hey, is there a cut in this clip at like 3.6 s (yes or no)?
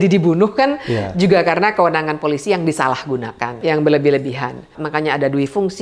yes